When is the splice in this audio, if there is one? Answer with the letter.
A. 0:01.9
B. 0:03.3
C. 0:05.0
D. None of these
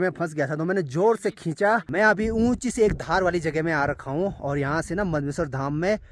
A